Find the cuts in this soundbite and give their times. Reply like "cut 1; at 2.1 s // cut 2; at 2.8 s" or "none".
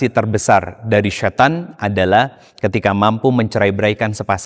none